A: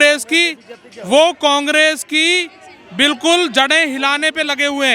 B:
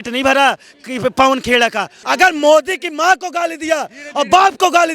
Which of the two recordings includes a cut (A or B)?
B